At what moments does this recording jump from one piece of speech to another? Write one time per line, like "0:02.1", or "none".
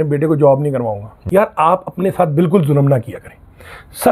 0:01.1